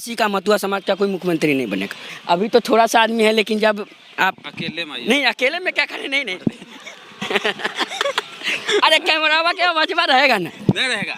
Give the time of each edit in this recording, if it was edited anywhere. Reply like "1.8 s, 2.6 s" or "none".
2.1 s